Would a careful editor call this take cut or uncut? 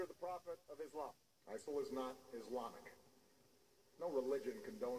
uncut